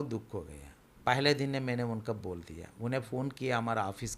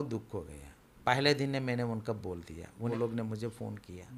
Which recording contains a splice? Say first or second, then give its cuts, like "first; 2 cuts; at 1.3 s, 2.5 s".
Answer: second; 1 cut; at 2.9 s